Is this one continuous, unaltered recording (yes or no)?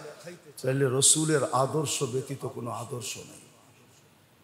yes